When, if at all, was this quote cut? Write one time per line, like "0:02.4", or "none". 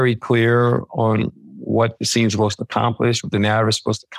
none